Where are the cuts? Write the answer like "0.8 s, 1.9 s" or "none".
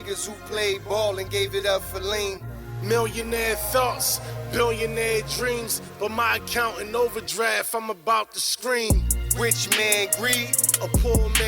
9.6 s